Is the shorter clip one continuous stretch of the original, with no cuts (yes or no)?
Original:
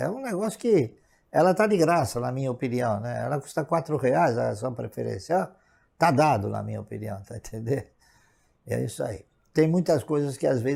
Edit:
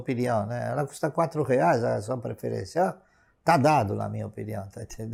yes